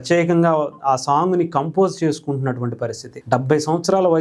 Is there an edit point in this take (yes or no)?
yes